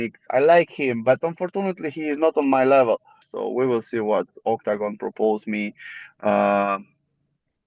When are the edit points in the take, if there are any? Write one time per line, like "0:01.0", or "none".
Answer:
0:03.2